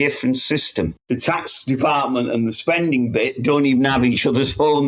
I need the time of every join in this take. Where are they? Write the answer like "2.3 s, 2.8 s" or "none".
1.0 s